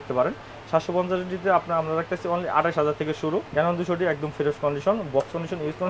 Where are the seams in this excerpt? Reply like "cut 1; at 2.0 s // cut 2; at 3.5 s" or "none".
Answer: cut 1; at 3.5 s